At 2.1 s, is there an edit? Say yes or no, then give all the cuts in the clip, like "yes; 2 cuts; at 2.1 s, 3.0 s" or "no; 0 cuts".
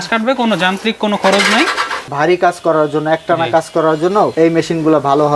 yes; 1 cut; at 2.1 s